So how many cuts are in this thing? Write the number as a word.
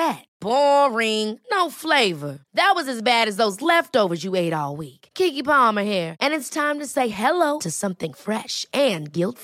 zero